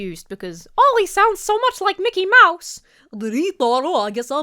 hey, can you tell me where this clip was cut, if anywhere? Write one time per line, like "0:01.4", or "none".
none